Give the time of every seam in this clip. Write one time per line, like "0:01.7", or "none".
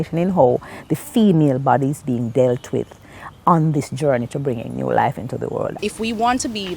0:05.8